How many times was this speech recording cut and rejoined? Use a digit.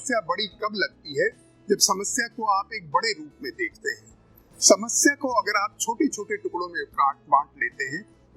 0